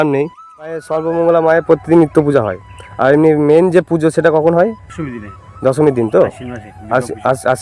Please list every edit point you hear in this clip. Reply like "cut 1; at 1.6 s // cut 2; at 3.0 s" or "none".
cut 1; at 0.9 s // cut 2; at 4.9 s